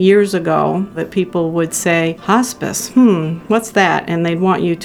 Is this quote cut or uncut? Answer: cut